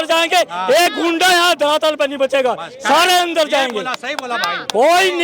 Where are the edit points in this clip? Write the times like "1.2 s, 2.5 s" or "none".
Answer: none